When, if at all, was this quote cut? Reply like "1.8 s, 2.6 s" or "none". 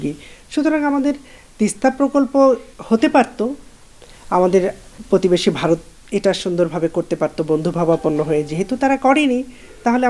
2.7 s, 4.9 s